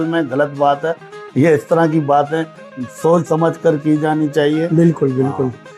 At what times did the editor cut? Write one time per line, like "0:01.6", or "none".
none